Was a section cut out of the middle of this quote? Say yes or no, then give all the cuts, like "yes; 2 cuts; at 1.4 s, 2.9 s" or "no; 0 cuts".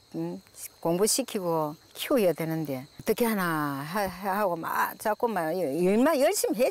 yes; 1 cut; at 2.9 s